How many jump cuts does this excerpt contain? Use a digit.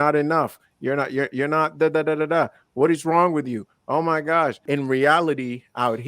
1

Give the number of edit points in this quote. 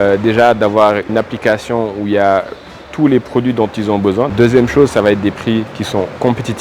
1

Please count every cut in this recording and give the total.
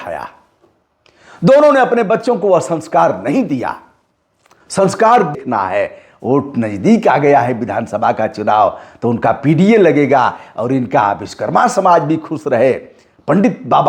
1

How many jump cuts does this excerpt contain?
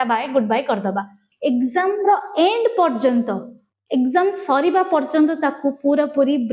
1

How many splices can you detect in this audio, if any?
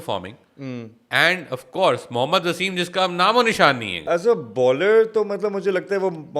1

